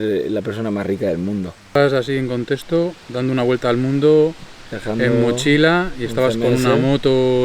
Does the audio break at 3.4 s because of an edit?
no; 1 cut; at 1.8 s

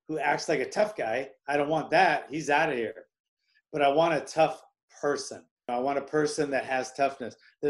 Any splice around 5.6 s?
yes; 1 cut; at 5.6 s

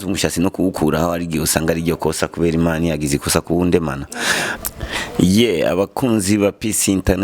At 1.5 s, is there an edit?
no; 1 cut; at 4.4 s

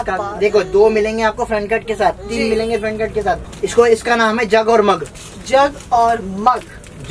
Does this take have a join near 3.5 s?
yes; 1 cut; at 3.5 s

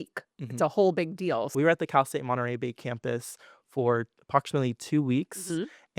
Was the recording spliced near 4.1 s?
no; 1 cut; at 1.5 s

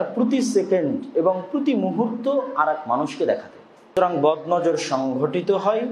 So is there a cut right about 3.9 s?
yes; 1 cut; at 3.9 s

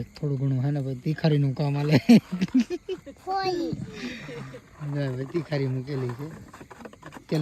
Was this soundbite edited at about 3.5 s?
no; 0 cuts

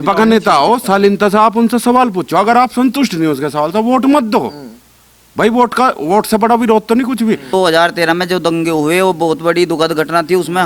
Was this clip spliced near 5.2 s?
no; 1 cut; at 7.5 s

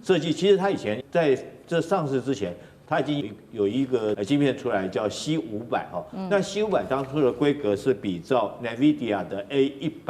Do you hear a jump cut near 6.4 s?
no; 3 cuts; at 1.0 s, 3.2 s, 4.2 s

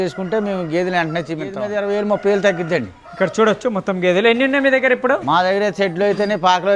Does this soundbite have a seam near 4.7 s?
no; 1 cut; at 1.7 s

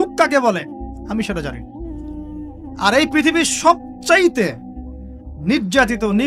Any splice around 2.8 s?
yes; 2 cuts; at 1.5 s, 2.8 s

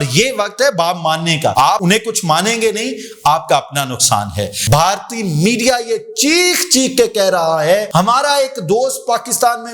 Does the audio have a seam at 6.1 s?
no; 3 cuts; at 1.7 s, 4.5 s, 7.9 s

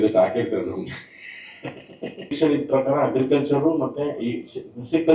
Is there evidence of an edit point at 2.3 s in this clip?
yes; 1 cut; at 2.3 s

